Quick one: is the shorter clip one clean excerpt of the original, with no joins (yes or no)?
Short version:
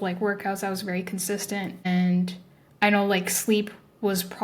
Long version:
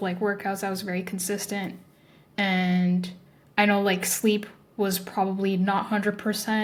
no